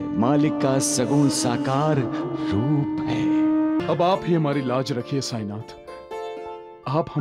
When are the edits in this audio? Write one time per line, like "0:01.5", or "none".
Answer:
0:03.8

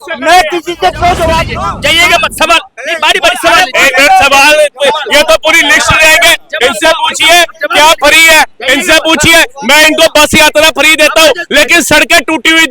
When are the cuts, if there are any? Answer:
0:01.6

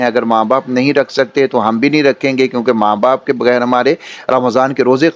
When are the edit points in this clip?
none

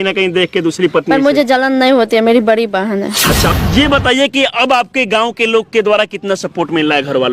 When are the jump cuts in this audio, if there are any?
0:03.6

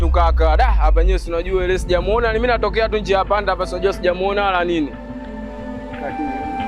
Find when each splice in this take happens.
0:05.5

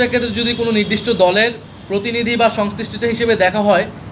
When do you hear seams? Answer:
0:01.7

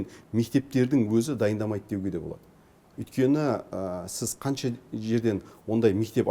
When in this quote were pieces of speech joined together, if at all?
none

